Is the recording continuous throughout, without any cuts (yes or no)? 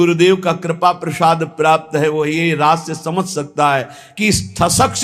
yes